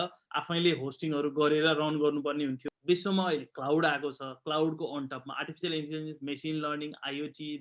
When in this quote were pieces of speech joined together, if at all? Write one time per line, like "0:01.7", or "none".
0:02.6